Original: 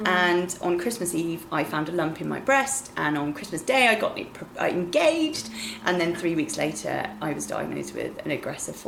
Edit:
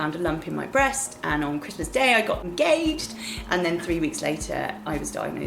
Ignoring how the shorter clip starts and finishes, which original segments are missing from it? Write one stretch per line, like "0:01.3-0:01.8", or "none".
0:04.2-0:04.8